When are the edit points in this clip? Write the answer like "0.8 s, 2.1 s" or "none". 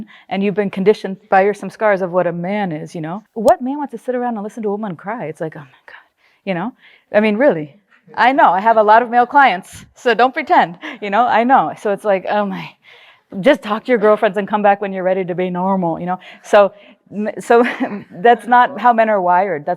3.2 s